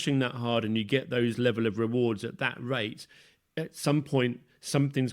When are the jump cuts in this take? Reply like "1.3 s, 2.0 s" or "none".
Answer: none